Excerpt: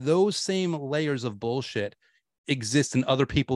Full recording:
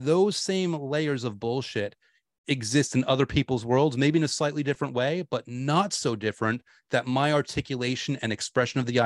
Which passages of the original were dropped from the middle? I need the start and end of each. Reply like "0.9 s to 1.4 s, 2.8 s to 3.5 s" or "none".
none